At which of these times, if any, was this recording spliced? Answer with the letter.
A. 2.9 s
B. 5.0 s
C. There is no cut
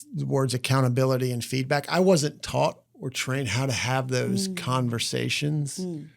A